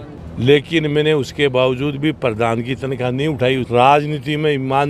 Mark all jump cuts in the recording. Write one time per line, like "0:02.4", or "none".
0:03.6